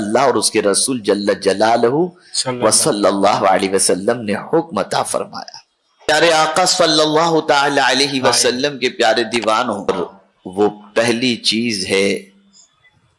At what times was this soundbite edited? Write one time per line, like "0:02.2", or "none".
0:06.1
0:09.9